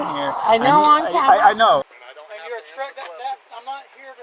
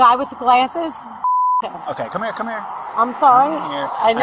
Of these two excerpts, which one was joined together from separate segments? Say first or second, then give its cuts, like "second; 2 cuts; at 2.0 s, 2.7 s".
first; 1 cut; at 1.9 s